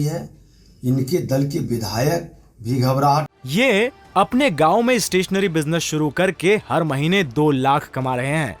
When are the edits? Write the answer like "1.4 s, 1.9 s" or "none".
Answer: 3.3 s